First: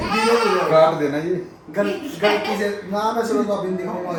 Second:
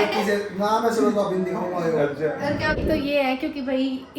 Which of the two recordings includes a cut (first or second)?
second